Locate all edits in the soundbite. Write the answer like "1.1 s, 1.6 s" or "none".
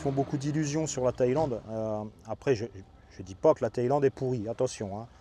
none